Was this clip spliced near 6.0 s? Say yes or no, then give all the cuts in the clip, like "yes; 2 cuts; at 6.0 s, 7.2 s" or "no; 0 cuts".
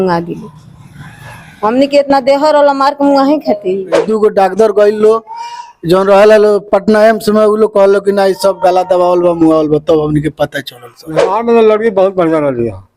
no; 2 cuts; at 4.1 s, 11.3 s